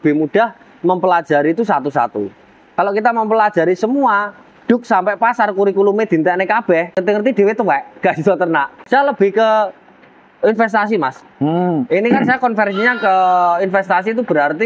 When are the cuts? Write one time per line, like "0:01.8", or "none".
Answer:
0:07.0
0:08.8